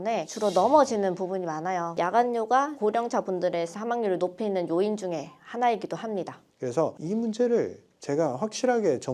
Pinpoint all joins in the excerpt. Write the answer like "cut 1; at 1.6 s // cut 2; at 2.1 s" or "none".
cut 1; at 1.9 s // cut 2; at 6.5 s